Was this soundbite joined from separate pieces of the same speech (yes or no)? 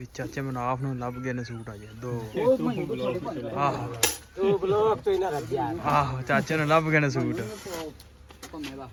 no